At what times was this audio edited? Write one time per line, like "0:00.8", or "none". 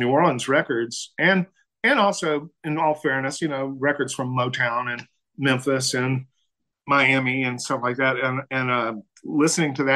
none